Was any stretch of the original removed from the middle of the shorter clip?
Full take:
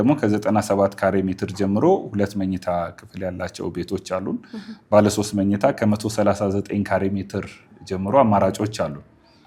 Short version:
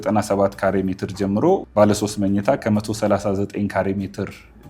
yes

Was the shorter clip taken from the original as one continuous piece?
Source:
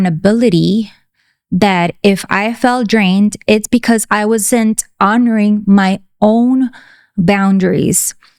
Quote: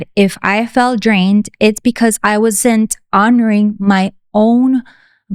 yes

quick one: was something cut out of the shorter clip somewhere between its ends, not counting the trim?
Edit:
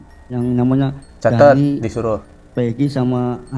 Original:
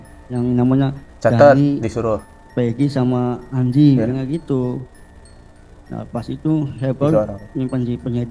no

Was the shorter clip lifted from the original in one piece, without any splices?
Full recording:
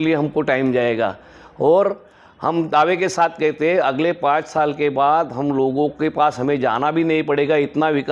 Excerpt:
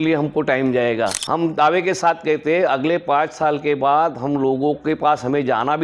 no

